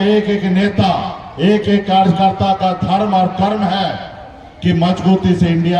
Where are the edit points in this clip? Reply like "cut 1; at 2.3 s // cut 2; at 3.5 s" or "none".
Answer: none